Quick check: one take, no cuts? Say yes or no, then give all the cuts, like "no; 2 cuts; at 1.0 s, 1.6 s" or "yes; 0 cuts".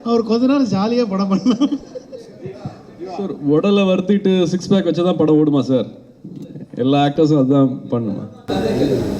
yes; 0 cuts